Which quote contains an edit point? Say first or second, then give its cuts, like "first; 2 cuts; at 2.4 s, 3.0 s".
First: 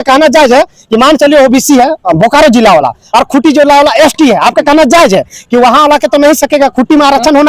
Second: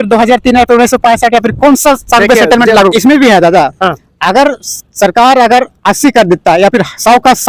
second; 1 cut; at 2.9 s